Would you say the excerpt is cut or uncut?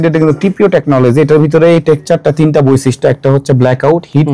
uncut